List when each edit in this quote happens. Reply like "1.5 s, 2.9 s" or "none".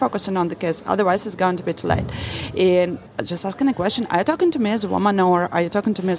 3.0 s